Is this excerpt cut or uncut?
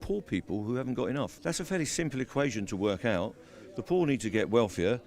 cut